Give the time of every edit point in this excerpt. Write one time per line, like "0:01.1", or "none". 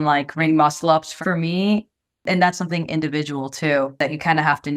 0:01.1
0:02.2
0:04.0